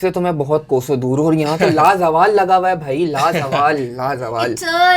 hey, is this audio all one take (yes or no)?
yes